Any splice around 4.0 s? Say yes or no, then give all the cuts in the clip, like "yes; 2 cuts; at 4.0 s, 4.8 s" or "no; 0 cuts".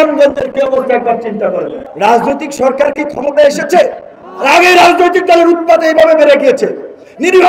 no; 1 cut; at 1.8 s